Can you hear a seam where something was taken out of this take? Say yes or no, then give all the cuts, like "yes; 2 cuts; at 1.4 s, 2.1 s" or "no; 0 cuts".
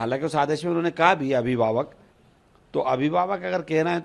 no; 0 cuts